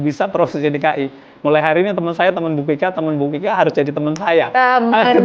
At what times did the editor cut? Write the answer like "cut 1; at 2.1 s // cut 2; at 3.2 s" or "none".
none